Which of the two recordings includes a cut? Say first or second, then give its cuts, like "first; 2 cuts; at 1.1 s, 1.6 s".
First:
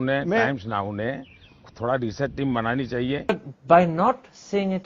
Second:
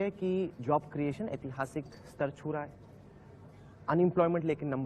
first; 1 cut; at 3.3 s